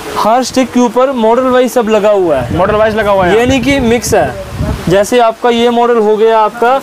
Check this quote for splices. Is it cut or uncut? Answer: uncut